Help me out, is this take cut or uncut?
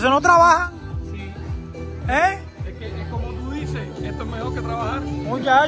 uncut